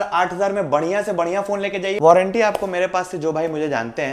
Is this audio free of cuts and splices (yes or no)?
no